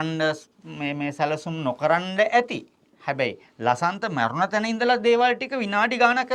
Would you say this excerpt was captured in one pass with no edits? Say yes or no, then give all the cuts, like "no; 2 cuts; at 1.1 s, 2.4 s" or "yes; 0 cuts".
yes; 0 cuts